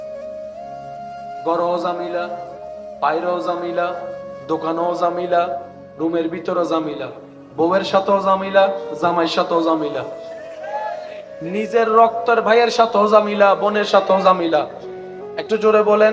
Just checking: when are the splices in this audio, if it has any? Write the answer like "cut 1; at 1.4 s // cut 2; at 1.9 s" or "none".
cut 1; at 1.4 s